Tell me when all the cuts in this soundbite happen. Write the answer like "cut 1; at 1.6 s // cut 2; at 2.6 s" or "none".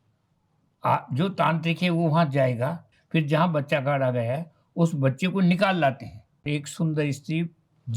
cut 1; at 2.9 s // cut 2; at 6.5 s